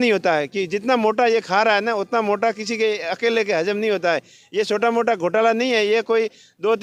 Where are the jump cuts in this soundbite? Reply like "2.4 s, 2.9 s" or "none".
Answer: none